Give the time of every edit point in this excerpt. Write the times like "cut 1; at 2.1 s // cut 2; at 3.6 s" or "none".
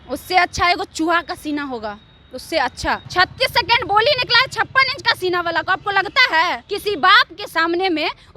cut 1; at 3.0 s // cut 2; at 6.6 s